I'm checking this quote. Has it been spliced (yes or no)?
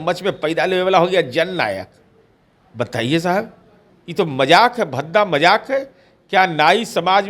no